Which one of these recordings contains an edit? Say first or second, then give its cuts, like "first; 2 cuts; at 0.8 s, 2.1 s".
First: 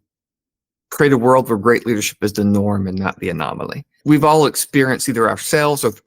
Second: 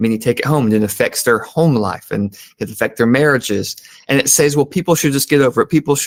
first; 1 cut; at 4.0 s